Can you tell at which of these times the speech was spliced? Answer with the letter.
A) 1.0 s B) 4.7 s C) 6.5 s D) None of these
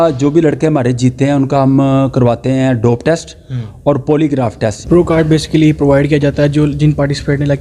B